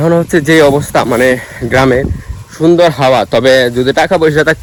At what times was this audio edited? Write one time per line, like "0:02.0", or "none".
none